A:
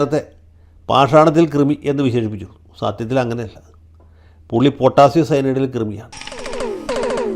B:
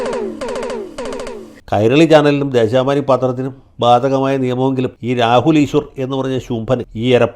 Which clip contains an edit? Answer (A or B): B